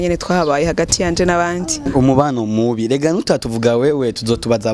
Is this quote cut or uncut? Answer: cut